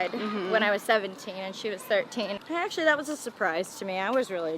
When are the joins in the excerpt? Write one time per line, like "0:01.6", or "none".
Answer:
0:02.4